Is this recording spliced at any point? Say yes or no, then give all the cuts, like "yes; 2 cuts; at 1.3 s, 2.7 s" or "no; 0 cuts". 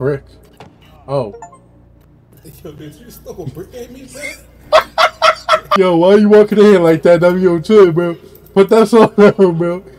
yes; 1 cut; at 5.7 s